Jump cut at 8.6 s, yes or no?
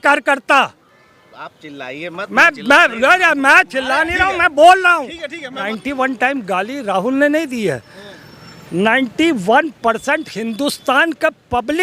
no